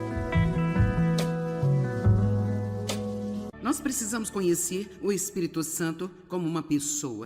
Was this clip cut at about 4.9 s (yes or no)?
no